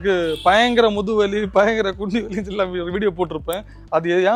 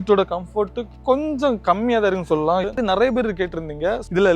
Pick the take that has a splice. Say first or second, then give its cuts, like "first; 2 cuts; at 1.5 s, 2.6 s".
second; 1 cut; at 2.6 s